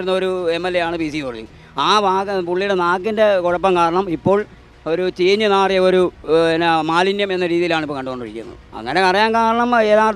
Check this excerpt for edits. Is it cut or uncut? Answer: uncut